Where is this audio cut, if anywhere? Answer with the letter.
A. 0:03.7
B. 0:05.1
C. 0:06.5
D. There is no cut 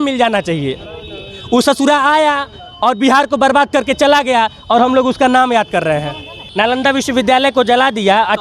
C